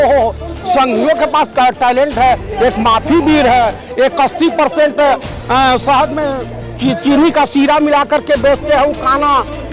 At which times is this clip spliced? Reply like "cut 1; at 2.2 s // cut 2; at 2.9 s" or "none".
none